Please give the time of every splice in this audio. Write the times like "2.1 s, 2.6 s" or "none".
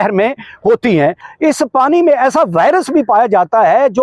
1.3 s